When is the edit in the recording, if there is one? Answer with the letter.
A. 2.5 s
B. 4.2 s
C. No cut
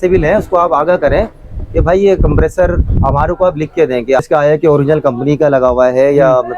B